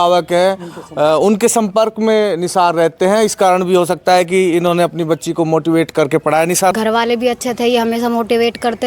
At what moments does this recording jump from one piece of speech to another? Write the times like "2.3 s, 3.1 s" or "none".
6.7 s